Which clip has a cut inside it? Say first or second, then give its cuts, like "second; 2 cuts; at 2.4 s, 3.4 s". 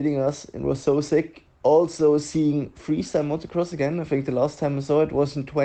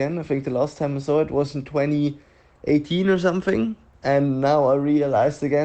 second; 1 cut; at 3.9 s